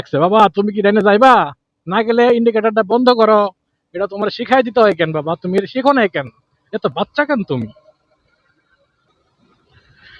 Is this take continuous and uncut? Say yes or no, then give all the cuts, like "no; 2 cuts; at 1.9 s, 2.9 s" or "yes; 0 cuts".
yes; 0 cuts